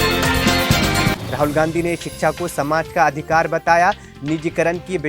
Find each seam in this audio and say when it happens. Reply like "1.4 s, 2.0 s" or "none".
1.2 s